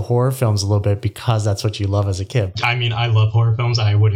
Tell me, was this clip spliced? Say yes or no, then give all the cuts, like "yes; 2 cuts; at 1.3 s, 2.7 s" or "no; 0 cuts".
yes; 1 cut; at 2.5 s